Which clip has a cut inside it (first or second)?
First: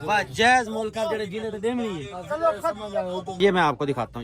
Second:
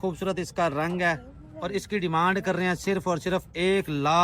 first